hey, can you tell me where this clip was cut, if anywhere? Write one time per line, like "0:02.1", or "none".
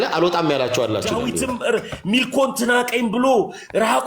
0:01.6